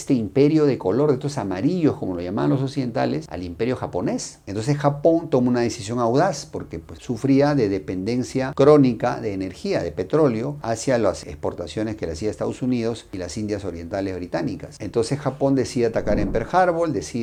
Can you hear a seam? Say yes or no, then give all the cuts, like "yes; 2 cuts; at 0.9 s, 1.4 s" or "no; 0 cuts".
no; 0 cuts